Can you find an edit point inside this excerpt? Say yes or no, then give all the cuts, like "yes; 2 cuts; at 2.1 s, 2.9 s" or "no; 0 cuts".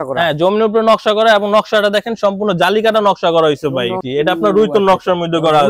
yes; 1 cut; at 4.0 s